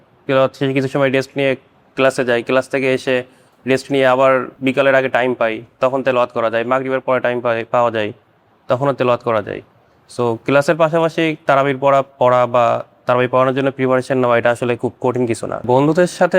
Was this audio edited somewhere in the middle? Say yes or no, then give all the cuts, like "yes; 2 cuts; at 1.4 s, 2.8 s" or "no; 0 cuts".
no; 0 cuts